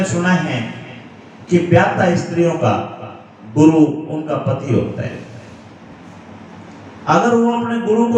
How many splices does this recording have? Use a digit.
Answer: 0